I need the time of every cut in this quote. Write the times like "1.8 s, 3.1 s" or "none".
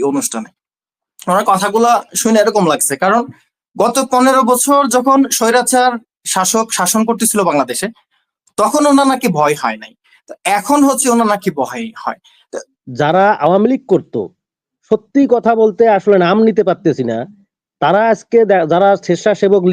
12.6 s